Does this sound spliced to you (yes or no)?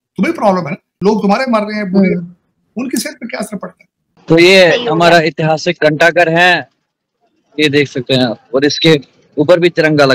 yes